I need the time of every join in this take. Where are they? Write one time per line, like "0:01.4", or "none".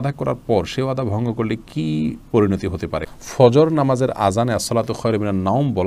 0:03.1